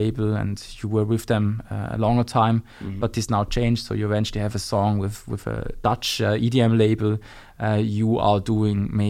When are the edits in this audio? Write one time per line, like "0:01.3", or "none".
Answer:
none

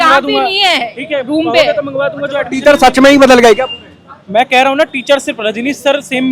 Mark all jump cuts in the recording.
none

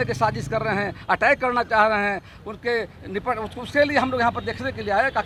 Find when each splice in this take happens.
none

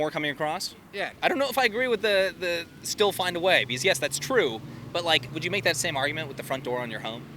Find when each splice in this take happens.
0:01.1
0:05.3

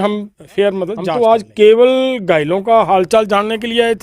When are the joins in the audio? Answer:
0:01.1

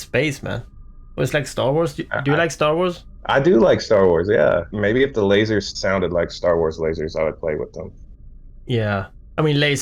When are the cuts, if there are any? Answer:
0:03.1
0:04.7
0:05.7

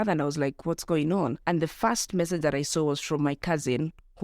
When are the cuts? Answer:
0:01.4

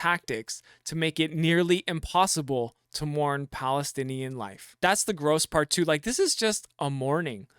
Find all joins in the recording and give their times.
0:04.8

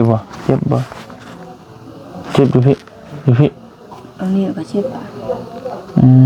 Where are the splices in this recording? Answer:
none

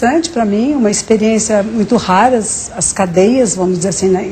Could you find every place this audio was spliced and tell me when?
0:01.0

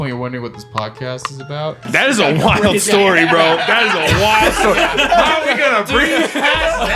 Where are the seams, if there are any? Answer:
0:01.9

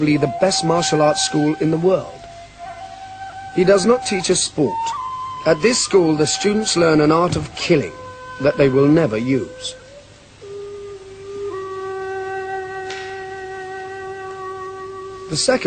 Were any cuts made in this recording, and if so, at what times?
0:03.7

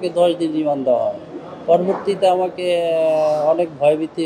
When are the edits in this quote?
none

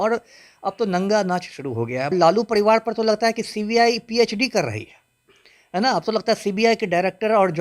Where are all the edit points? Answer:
0:02.1

